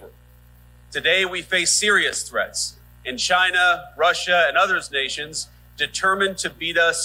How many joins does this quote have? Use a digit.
0